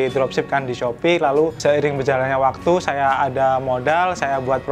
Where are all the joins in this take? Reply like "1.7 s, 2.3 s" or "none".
1.6 s